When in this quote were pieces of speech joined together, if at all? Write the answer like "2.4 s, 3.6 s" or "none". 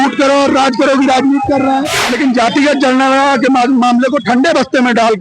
2.0 s